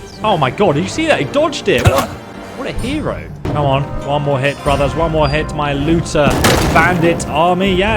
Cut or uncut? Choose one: cut